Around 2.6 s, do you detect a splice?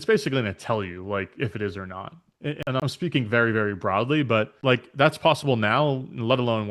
yes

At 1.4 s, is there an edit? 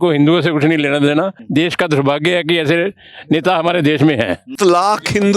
yes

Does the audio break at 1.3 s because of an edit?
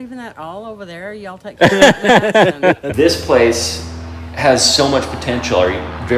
no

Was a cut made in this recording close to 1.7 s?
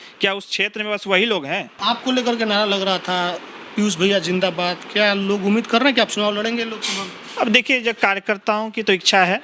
yes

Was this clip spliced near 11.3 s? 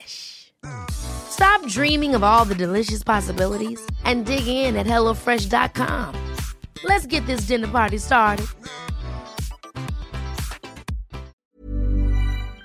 yes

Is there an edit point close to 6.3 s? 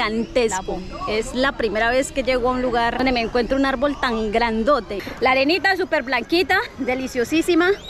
no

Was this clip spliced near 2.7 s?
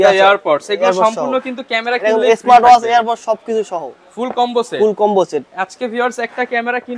no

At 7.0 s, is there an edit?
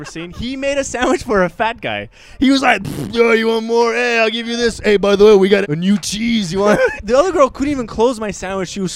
yes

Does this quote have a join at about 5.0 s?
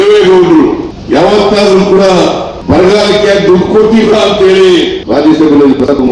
yes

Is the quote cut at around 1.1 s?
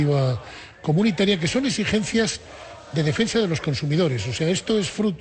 no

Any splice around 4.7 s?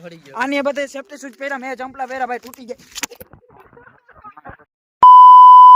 yes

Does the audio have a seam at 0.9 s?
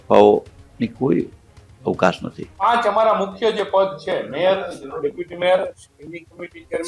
no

